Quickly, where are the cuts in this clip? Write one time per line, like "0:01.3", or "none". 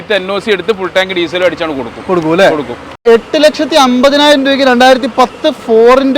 0:03.0